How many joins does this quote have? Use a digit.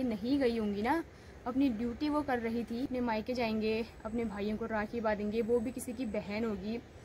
1